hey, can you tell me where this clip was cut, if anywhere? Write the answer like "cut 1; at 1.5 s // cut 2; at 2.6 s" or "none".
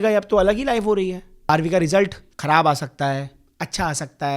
cut 1; at 1.3 s // cut 2; at 2.3 s